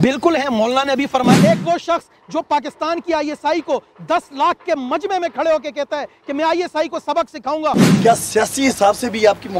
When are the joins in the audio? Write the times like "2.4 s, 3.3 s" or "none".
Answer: 1.4 s, 7.8 s

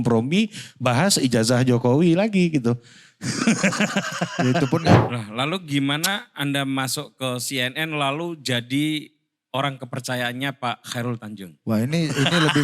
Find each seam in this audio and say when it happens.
5.0 s

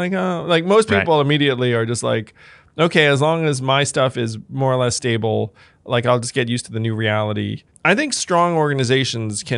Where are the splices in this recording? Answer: 7.6 s

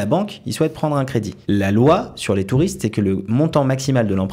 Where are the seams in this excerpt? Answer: 1.3 s

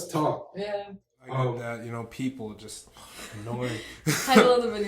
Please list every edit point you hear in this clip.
1.6 s

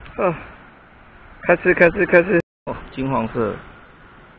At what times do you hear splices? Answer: 2.5 s

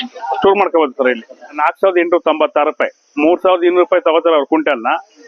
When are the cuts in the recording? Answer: 1.6 s

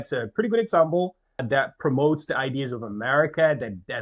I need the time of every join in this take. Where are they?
1.4 s

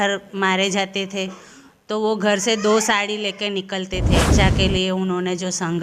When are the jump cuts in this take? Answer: 4.3 s

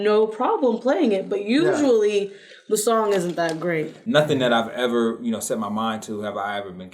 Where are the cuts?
3.9 s

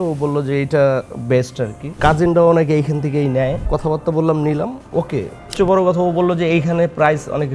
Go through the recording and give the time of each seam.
2.0 s, 3.6 s, 5.5 s

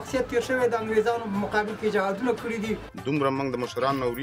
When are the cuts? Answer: 2.9 s

